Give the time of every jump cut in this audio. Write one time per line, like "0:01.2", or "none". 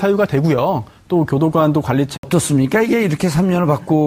none